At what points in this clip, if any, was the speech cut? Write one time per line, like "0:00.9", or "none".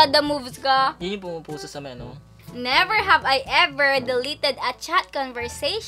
0:02.5